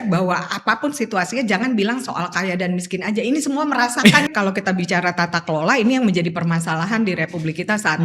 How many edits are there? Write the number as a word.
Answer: one